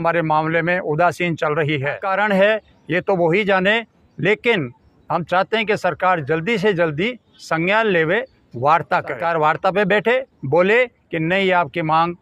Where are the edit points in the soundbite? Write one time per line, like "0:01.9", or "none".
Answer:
0:02.0
0:09.1

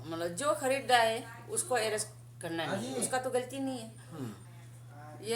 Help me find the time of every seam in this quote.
0:04.4

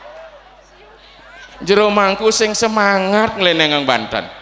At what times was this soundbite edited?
0:01.6

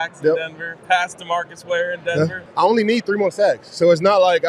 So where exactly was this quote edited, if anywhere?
0:02.4

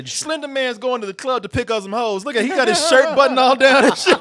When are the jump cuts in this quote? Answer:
none

